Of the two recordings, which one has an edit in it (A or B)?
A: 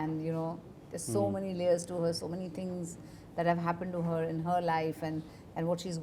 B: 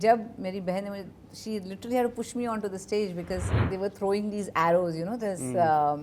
B